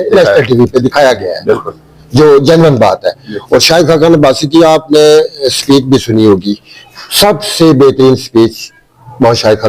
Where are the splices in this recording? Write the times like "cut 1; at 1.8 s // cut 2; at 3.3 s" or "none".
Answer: none